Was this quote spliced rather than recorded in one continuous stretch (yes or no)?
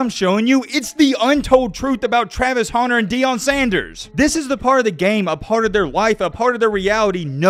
no